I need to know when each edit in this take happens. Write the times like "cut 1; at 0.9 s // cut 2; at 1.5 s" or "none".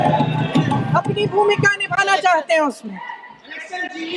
none